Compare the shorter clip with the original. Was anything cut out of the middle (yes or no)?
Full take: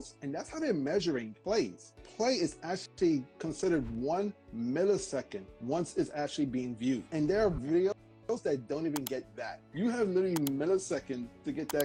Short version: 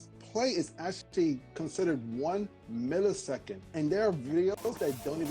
yes